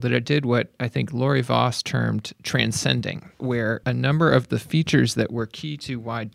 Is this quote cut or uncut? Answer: cut